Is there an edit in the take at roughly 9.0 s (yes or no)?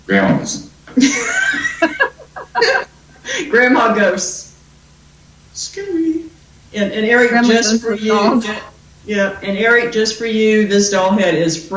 yes